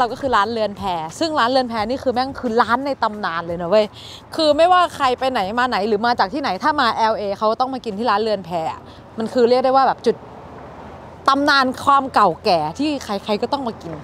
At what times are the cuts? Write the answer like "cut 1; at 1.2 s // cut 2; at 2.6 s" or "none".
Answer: none